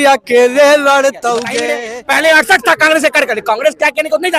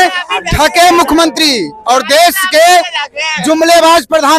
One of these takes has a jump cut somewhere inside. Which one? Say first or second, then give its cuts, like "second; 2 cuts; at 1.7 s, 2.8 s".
first; 1 cut; at 1.6 s